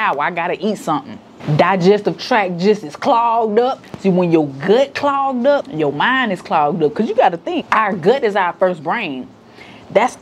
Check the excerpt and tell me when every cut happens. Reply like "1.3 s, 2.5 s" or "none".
3.9 s, 5.7 s, 7.6 s